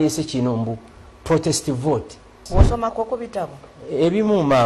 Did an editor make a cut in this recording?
yes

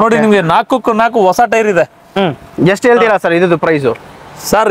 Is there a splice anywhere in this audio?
no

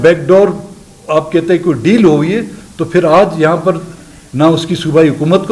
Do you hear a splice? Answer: no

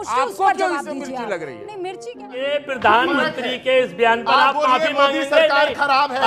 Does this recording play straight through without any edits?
no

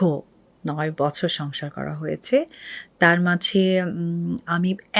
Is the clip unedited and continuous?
yes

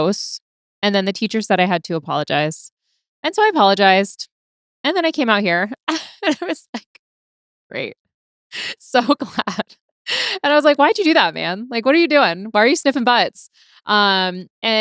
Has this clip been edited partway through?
no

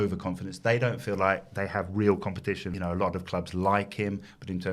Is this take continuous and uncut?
no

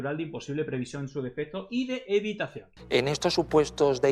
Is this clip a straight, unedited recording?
no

